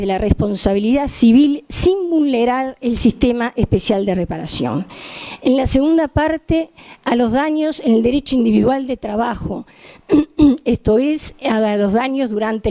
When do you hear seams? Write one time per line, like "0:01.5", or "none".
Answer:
0:04.4